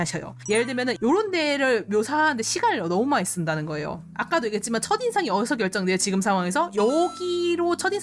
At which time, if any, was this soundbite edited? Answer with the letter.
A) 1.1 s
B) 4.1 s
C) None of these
C